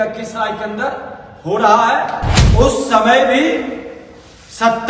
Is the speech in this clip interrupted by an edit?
yes; 1 cut; at 2.3 s

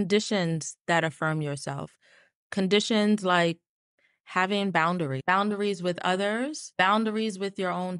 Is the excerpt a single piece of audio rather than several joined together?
no; 2 cuts; at 5.2 s, 6.6 s

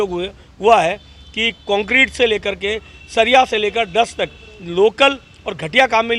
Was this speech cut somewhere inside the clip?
no; 0 cuts

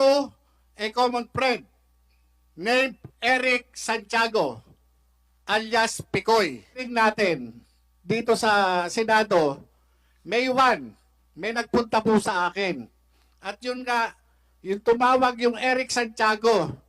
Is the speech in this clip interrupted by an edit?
yes; 1 cut; at 6.9 s

